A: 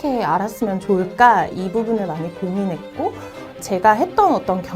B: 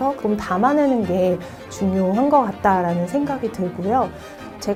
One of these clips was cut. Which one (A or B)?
A